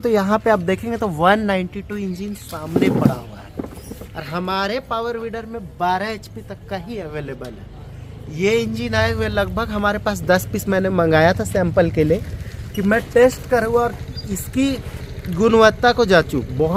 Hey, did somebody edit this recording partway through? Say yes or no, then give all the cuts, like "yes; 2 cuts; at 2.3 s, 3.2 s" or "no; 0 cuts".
no; 0 cuts